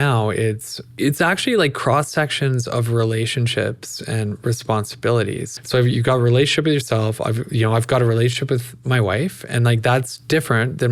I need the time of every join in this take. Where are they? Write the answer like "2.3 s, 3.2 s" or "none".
1.0 s, 5.5 s